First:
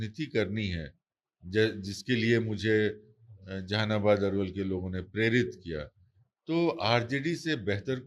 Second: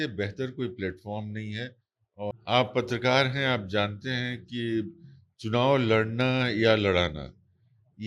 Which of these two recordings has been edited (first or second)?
second